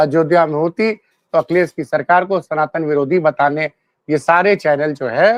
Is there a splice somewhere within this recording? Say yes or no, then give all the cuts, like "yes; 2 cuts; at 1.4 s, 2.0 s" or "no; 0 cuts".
no; 0 cuts